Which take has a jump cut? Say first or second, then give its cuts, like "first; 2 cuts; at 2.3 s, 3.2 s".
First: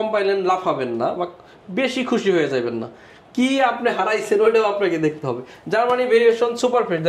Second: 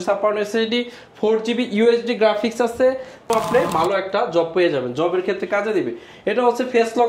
second; 1 cut; at 3.3 s